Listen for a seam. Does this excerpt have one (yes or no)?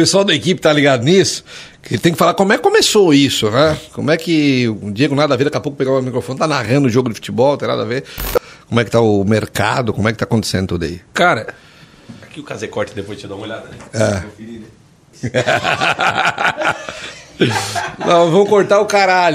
yes